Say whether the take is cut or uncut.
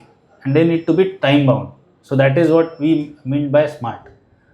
uncut